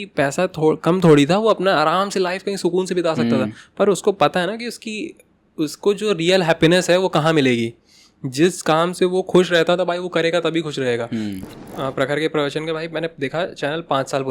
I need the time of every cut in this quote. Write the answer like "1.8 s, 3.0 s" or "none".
11.4 s